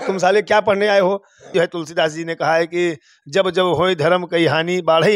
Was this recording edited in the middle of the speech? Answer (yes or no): yes